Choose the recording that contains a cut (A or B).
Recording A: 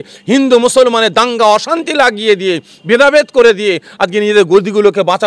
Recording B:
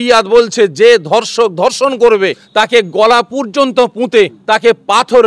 B